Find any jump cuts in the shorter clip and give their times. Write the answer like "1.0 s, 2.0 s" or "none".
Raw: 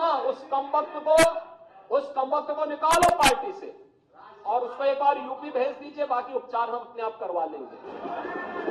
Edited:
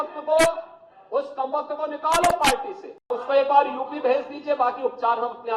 3.2 s